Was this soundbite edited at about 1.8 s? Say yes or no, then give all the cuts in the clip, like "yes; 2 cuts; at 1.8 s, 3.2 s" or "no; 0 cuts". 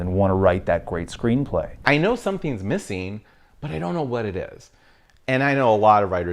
yes; 1 cut; at 1.8 s